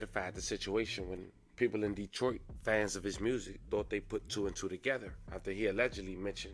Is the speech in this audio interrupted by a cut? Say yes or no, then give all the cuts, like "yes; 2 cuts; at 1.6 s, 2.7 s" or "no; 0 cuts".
no; 0 cuts